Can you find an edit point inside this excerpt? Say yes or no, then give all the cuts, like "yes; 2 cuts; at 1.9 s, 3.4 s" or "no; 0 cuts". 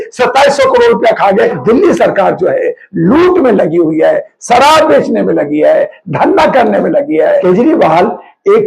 yes; 2 cuts; at 1.6 s, 7.4 s